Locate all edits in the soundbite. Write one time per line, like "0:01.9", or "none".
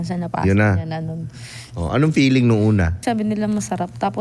0:03.0